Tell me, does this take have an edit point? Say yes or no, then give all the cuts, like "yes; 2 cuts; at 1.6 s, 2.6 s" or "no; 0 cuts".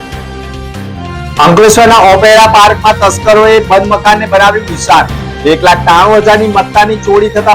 yes; 1 cut; at 0.9 s